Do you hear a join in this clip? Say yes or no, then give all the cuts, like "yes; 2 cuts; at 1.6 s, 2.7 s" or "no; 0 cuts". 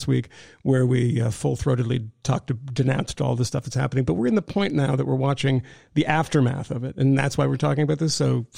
no; 0 cuts